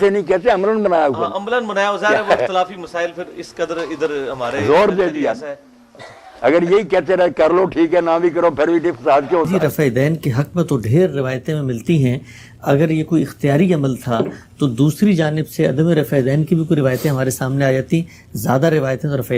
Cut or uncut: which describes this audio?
cut